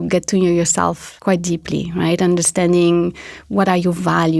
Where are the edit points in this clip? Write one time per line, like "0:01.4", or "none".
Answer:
0:01.1